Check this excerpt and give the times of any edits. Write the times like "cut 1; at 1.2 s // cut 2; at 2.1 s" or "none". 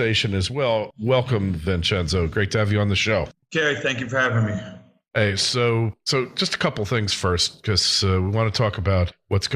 cut 1; at 5.0 s